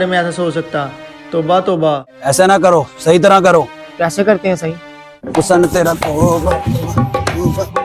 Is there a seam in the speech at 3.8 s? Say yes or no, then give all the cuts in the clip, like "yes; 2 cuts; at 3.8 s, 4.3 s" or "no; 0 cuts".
yes; 2 cuts; at 2.1 s, 3.8 s